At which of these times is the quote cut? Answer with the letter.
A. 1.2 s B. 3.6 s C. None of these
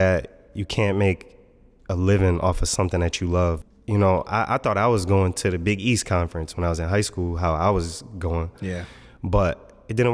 B